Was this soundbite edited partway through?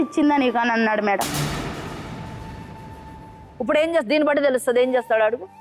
yes; 2 cuts; at 1.3 s, 3.2 s

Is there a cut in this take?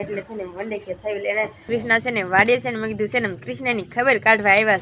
yes; 1 cut; at 1.6 s

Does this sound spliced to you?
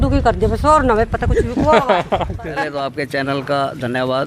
yes; 1 cut; at 2.6 s

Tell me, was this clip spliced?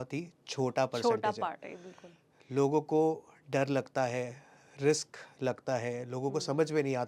no; 0 cuts

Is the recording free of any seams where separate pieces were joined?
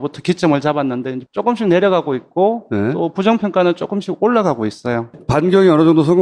no; 1 cut; at 2.8 s

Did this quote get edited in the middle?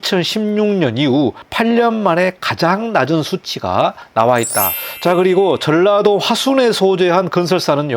yes; 3 cuts; at 1.4 s, 4.0 s, 4.8 s

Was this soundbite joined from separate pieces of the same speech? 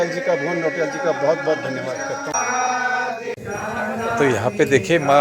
no; 0 cuts

